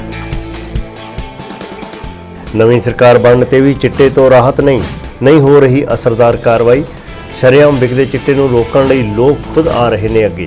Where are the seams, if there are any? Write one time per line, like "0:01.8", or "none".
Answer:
0:01.9